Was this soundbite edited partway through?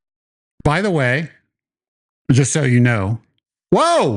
no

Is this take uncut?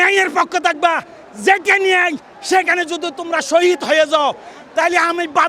yes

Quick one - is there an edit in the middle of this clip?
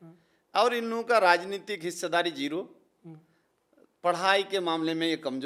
no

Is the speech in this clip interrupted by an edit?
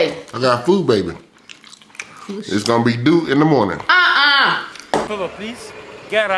no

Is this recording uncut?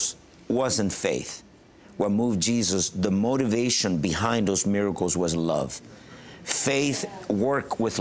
yes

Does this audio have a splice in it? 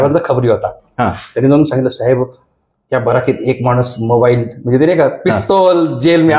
no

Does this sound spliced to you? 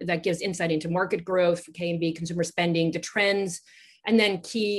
no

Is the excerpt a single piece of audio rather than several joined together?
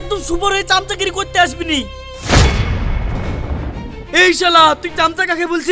yes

